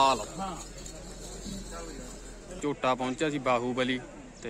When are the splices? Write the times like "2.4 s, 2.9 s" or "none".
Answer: 2.6 s